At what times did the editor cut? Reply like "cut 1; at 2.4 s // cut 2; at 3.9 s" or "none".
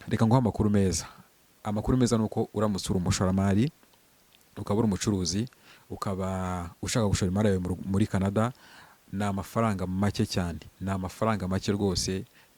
none